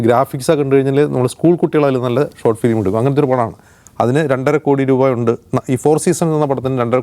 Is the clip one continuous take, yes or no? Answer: yes